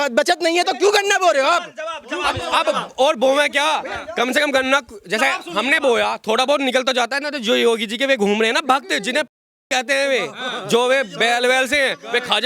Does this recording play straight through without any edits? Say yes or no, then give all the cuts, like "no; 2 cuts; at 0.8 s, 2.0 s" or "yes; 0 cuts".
yes; 0 cuts